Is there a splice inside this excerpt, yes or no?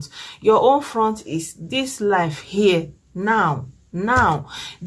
no